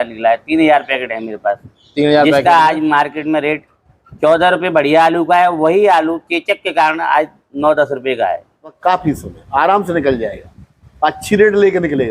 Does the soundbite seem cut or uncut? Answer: cut